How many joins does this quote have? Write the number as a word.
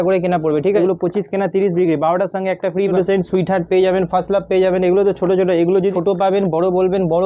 three